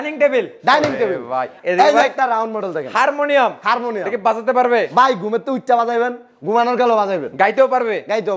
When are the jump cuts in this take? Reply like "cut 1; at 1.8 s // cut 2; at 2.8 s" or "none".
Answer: cut 1; at 1.5 s